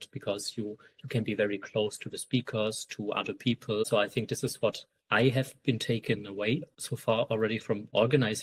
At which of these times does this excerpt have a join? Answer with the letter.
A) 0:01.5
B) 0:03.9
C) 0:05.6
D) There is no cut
D